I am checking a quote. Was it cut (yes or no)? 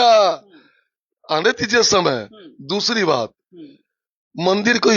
no